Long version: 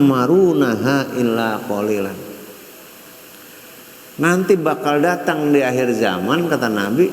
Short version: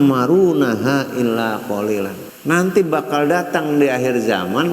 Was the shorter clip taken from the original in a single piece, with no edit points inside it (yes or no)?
no